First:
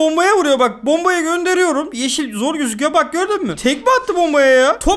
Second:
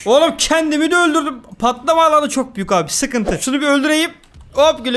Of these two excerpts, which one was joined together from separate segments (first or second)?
second